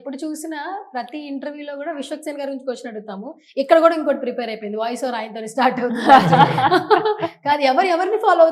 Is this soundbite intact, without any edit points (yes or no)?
yes